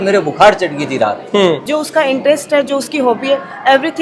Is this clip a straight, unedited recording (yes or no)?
no